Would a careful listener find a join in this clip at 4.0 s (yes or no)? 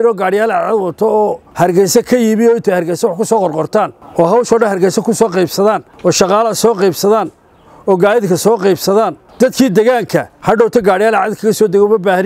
yes